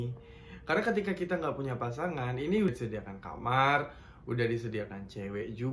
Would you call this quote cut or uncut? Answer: cut